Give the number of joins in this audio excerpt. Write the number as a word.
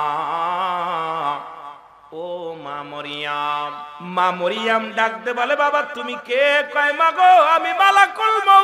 one